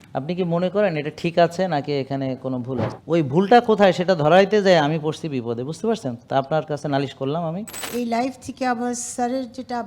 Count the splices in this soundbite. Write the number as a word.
two